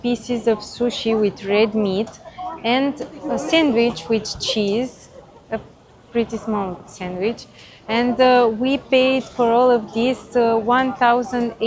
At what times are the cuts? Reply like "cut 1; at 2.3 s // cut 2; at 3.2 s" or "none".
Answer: none